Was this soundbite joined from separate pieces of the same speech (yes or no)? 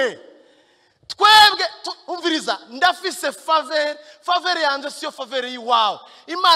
no